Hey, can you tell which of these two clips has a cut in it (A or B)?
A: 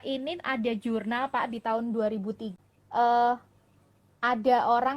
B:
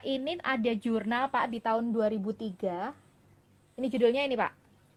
A